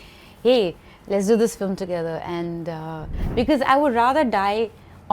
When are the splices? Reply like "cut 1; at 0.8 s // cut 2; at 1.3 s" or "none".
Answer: cut 1; at 3.0 s